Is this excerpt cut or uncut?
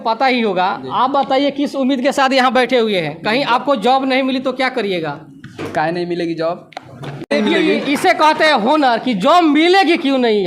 cut